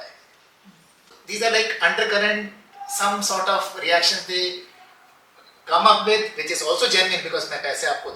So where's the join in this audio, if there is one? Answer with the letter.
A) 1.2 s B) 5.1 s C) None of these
A